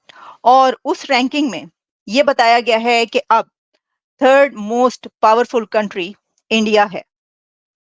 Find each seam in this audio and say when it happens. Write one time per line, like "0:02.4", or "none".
none